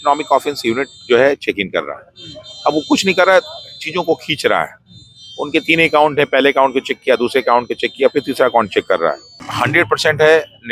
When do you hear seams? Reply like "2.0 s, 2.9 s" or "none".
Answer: 9.5 s